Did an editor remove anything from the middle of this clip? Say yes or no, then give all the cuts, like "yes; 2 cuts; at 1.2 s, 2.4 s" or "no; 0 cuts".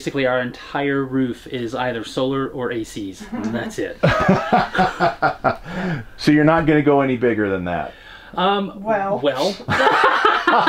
no; 0 cuts